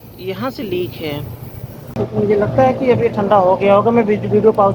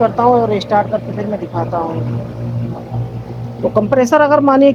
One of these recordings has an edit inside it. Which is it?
first; 1 cut; at 1.8 s

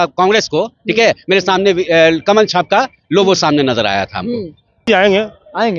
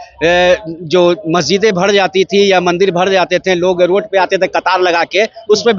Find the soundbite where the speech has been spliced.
first; 1 cut; at 4.9 s

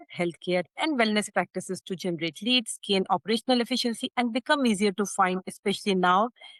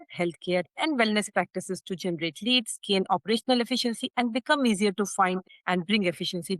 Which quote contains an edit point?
second; 1 cut; at 5.5 s

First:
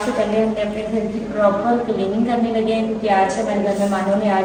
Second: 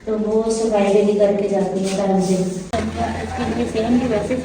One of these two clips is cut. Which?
second; 1 cut; at 2.7 s

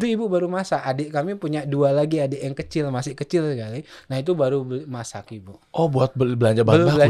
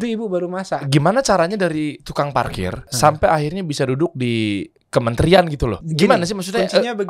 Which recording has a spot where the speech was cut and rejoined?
second; 4 cuts; at 0.9 s, 2.9 s, 4.7 s, 5.8 s

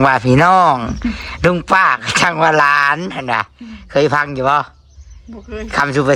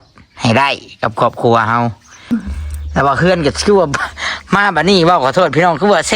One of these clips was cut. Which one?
second; 1 cut; at 2.2 s

